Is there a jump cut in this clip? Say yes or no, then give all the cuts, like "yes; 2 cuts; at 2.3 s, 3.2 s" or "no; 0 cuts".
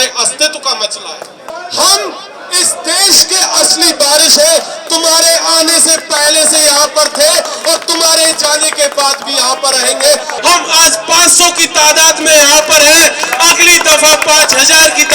yes; 2 cuts; at 1.5 s, 10.3 s